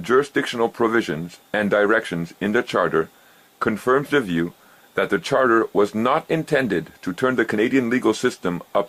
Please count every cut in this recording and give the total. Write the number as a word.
one